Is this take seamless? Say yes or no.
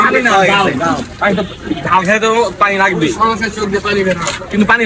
no